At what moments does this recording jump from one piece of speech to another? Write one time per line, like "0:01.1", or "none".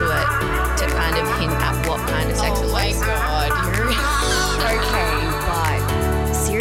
none